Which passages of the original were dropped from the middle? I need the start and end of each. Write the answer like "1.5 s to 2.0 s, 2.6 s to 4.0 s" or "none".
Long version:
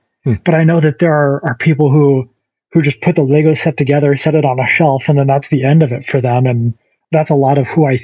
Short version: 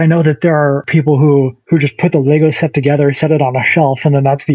1.4 s to 1.6 s, 2.3 s to 2.6 s